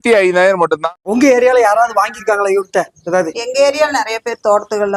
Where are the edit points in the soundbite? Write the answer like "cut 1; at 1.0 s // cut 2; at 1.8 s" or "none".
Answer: cut 1; at 1.0 s